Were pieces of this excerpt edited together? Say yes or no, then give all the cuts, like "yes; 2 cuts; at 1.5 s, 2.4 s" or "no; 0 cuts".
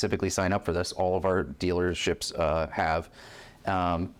no; 0 cuts